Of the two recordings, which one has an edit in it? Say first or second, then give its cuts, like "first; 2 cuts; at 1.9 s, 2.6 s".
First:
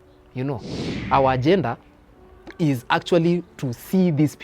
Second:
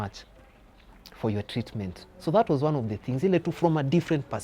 first; 1 cut; at 0.9 s